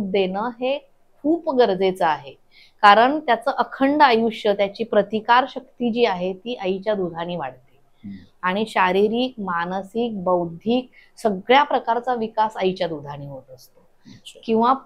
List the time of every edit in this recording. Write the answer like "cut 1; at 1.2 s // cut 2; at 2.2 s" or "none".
none